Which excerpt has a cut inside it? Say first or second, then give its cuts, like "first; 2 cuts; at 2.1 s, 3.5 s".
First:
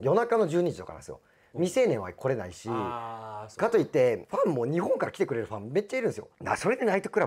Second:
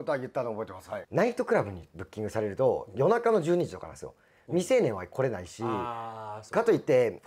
second; 1 cut; at 1.1 s